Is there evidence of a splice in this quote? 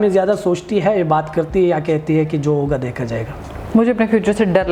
no; 0 cuts

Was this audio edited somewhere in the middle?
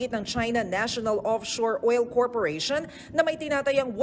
no; 0 cuts

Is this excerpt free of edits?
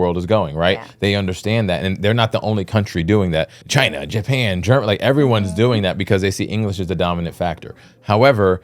no; 1 cut; at 3.6 s

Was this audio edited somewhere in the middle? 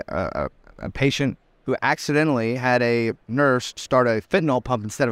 no; 0 cuts

